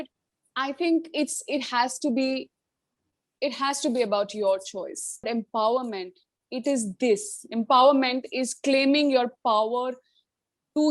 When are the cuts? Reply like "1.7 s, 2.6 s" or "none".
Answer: 5.3 s

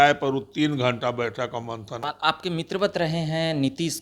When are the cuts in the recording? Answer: 2.0 s

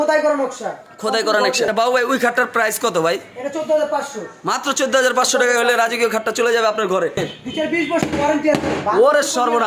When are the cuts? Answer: 1.7 s, 7.3 s

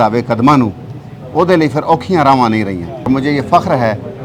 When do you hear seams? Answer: 3.1 s

